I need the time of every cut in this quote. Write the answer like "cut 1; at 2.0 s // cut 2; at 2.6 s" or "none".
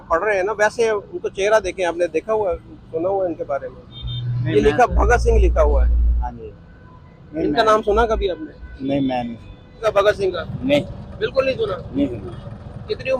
cut 1; at 9.8 s

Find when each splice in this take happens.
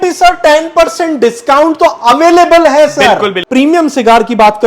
cut 1; at 3.4 s

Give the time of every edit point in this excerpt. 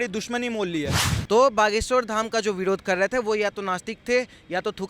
cut 1; at 1.1 s

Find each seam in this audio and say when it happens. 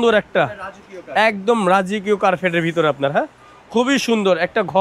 none

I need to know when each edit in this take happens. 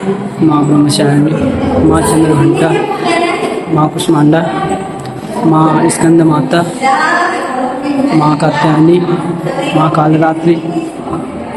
none

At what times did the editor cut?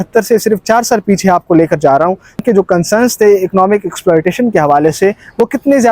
cut 1; at 2.4 s

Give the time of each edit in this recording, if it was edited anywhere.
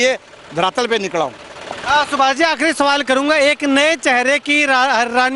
none

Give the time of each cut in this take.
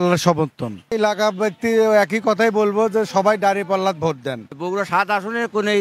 cut 1; at 1.0 s // cut 2; at 4.5 s

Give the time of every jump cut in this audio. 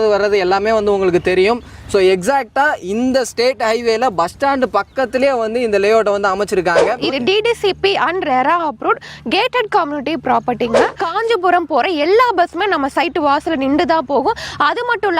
cut 1; at 7.0 s // cut 2; at 11.0 s

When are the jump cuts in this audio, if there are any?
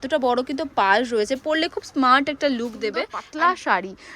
cut 1; at 3.2 s

